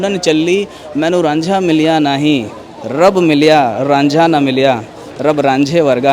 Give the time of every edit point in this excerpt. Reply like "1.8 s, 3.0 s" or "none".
none